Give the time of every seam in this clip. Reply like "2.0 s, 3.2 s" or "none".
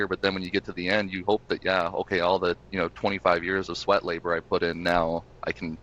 none